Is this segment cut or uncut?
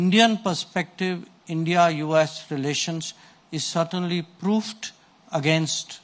uncut